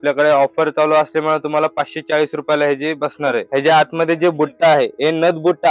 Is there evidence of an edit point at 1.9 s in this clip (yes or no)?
no